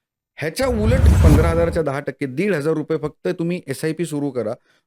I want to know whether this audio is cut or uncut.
cut